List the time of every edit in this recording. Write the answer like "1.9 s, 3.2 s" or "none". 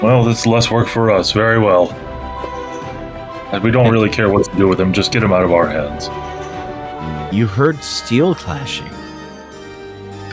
7.3 s